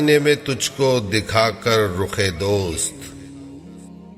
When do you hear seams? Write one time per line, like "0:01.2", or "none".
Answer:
0:02.9